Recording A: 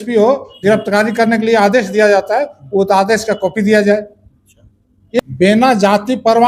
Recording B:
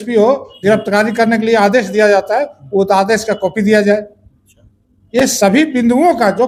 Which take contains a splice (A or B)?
A